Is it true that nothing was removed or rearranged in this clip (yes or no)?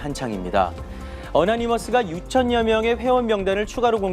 no